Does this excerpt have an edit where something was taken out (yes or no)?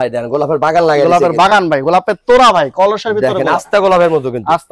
no